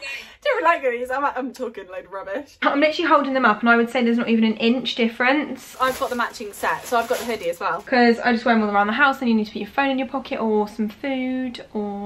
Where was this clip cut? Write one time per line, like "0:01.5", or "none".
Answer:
0:02.6
0:05.7
0:07.7